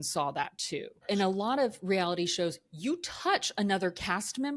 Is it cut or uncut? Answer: cut